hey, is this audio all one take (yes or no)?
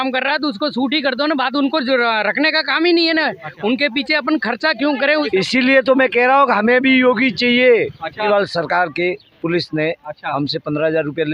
no